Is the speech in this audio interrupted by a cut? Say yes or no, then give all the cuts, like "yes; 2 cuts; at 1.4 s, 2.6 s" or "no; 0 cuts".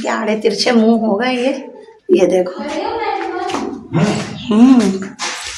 no; 0 cuts